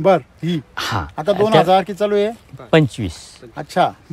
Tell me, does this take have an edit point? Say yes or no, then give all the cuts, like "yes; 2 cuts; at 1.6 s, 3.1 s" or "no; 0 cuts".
no; 0 cuts